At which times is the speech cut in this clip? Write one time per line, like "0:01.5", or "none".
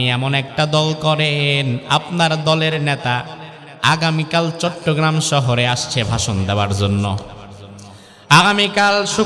none